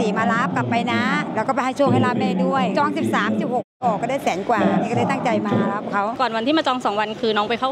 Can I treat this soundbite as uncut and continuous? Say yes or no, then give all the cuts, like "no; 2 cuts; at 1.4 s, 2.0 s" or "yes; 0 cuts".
no; 1 cut; at 6.1 s